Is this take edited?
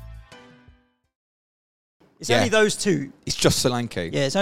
yes; 1 cut; at 1.9 s

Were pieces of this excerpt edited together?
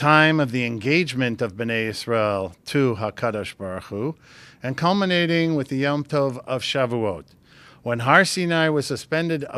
no; 0 cuts

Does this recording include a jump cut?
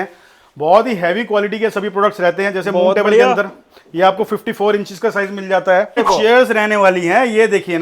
yes; 1 cut; at 6.0 s

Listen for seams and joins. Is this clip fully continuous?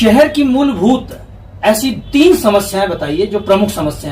yes; 0 cuts

